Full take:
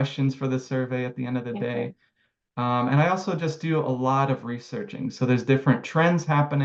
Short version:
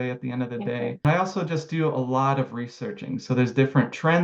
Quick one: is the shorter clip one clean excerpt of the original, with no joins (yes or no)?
no